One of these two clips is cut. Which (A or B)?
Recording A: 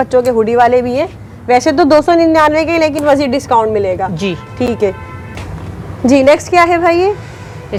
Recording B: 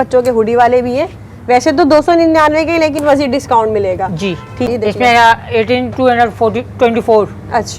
B